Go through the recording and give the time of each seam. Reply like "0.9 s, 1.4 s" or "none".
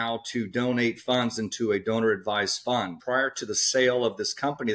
3.0 s